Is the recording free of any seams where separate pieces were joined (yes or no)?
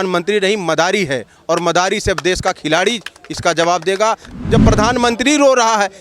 no